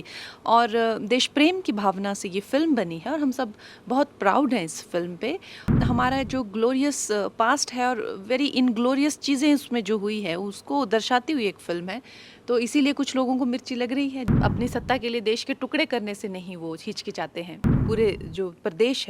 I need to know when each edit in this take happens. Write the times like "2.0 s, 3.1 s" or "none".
5.7 s, 14.3 s, 17.7 s